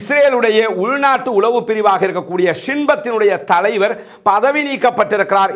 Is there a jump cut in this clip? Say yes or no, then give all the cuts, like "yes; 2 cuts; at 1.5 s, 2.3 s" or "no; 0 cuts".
no; 0 cuts